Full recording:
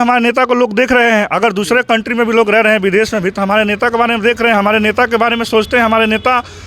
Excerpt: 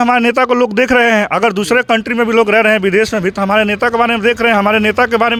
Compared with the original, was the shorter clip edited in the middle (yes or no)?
no